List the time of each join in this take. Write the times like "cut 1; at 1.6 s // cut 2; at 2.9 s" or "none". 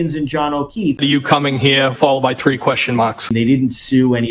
cut 1; at 1.0 s // cut 2; at 2.0 s // cut 3; at 3.3 s